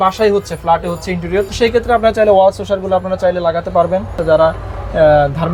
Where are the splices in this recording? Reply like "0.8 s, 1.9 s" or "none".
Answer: 1.5 s, 4.2 s